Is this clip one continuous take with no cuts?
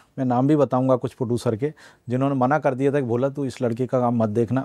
yes; 0 cuts

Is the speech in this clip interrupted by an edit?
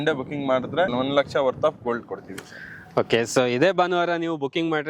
yes; 1 cut; at 0.9 s

